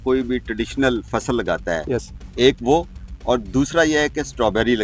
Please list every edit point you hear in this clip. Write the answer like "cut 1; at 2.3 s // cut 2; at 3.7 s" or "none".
cut 1; at 1.8 s